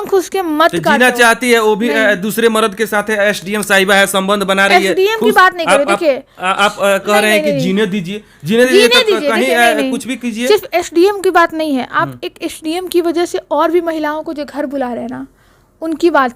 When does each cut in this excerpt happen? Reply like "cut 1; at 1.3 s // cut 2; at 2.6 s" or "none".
none

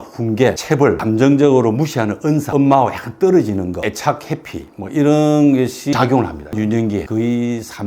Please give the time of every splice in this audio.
cut 1; at 0.9 s // cut 2; at 2.5 s // cut 3; at 3.8 s // cut 4; at 6.5 s

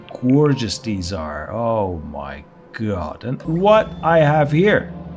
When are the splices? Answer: cut 1; at 3.4 s

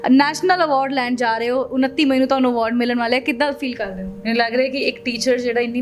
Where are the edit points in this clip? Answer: cut 1; at 4.1 s

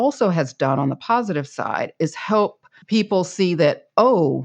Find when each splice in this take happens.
cut 1; at 2.7 s

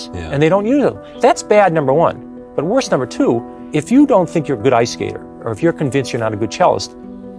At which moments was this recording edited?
cut 1; at 1.1 s // cut 2; at 3.6 s

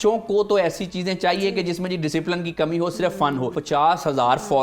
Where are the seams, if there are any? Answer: cut 1; at 3.6 s

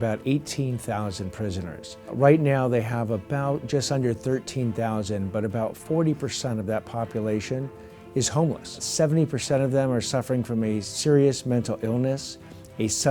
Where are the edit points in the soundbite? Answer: cut 1; at 2.1 s // cut 2; at 5.8 s // cut 3; at 8.9 s // cut 4; at 10.9 s

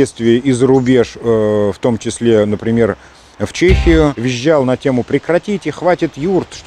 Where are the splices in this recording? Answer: cut 1; at 4.2 s

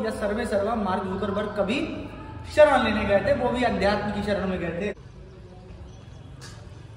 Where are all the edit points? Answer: cut 1; at 5.0 s

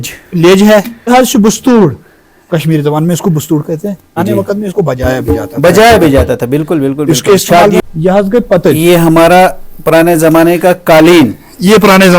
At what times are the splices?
cut 1; at 1.1 s // cut 2; at 4.2 s // cut 3; at 7.8 s

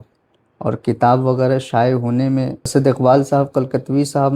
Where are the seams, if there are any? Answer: cut 1; at 2.7 s

